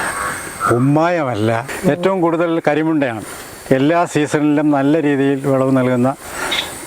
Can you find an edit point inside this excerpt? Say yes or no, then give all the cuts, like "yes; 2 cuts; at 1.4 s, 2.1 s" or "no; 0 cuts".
yes; 1 cut; at 1.7 s